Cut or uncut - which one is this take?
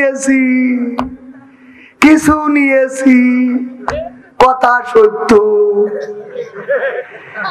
uncut